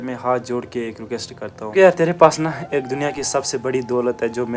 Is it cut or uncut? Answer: cut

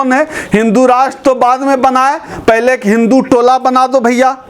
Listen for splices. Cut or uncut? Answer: uncut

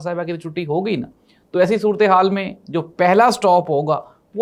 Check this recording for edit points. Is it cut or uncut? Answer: uncut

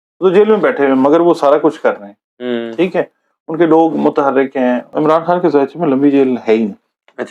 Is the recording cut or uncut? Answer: cut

